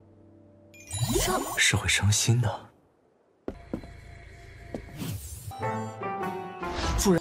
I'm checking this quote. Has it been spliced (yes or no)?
no